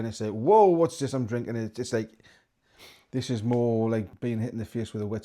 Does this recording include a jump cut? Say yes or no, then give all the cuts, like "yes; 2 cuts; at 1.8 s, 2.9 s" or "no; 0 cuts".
yes; 1 cut; at 4.1 s